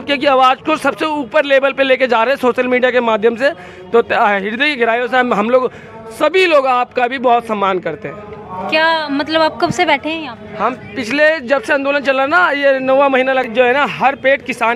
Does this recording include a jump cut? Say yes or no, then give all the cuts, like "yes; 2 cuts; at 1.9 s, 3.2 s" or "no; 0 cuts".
no; 0 cuts